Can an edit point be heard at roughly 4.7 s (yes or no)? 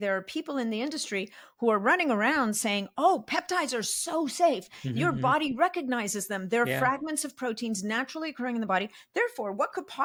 no